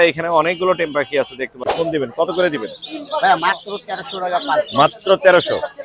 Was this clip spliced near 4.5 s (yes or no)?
no